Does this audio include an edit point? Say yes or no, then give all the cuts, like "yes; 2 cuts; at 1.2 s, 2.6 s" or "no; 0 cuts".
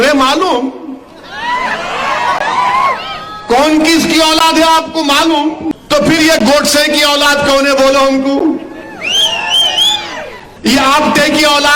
yes; 2 cuts; at 5.7 s, 10.5 s